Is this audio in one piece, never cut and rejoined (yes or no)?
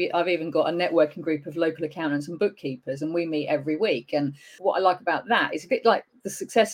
no